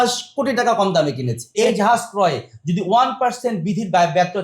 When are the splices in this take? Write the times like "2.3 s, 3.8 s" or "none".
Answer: 1.5 s

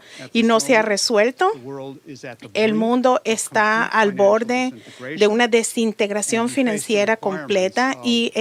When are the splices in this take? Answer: none

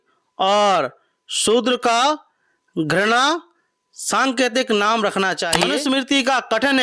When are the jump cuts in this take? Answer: 5.6 s

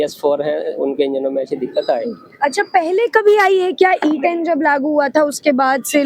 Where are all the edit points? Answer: none

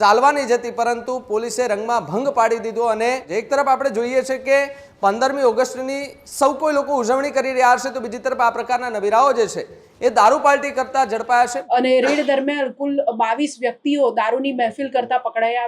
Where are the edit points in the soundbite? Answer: 3.2 s, 11.6 s

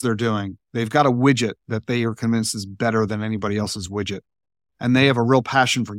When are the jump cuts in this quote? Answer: none

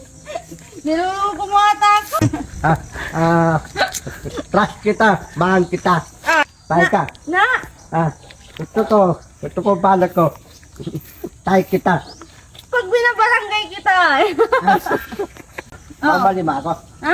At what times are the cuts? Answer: 2.1 s, 6.5 s, 15.8 s

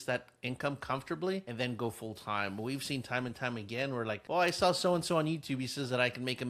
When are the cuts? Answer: 1.5 s, 4.2 s

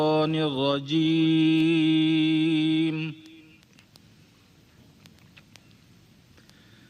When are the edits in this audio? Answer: 3.9 s

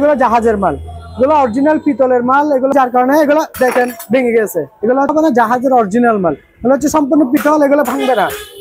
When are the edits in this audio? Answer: 2.7 s, 5.1 s

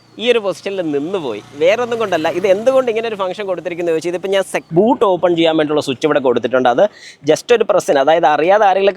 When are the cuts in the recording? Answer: 4.6 s

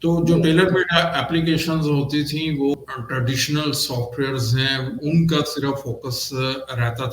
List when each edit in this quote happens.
2.7 s

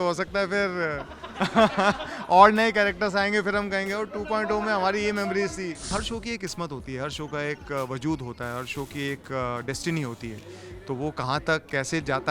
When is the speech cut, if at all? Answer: 5.9 s

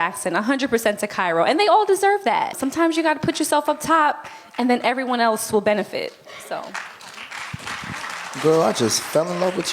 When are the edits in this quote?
2.6 s

